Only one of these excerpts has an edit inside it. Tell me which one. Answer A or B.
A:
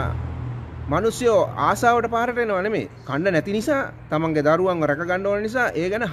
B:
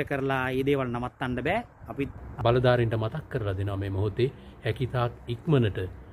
B